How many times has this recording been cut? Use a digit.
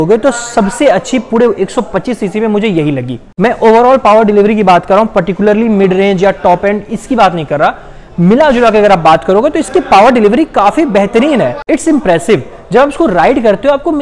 0